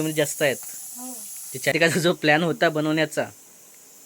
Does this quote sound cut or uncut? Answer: cut